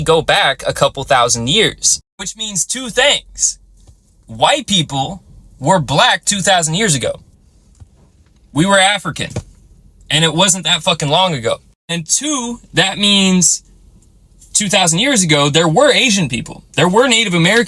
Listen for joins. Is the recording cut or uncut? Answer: uncut